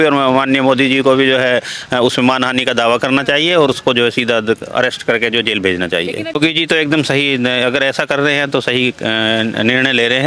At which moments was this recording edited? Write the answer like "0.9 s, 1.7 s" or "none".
6.4 s